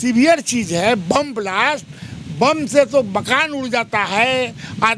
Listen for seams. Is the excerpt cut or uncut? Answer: uncut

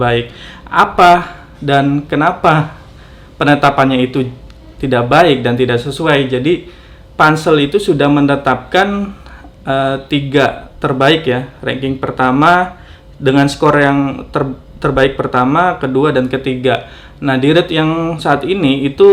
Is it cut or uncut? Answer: uncut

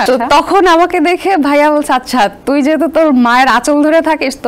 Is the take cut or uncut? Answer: uncut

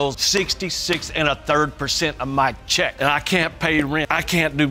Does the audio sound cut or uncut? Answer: uncut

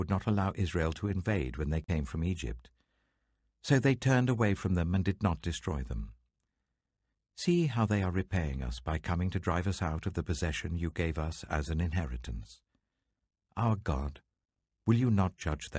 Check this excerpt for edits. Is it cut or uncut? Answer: uncut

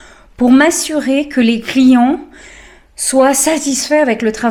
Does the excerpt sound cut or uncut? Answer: uncut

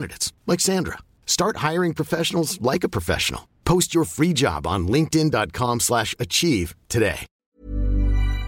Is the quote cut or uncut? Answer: cut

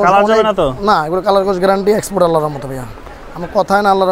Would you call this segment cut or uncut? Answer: uncut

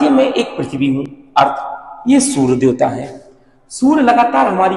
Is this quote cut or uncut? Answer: uncut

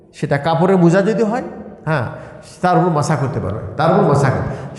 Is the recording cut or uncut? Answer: uncut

